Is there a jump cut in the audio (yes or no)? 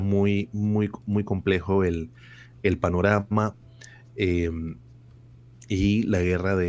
no